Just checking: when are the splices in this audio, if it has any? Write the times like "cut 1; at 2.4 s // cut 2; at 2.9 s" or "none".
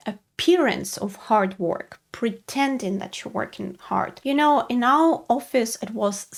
none

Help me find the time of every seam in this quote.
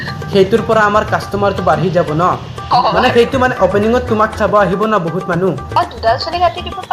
cut 1; at 2.7 s // cut 2; at 5.8 s

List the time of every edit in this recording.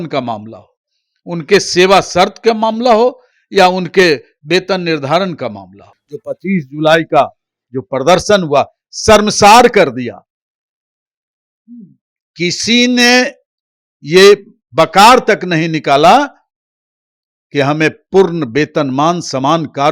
cut 1; at 6.3 s

